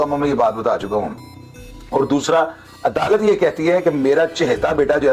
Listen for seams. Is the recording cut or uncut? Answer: uncut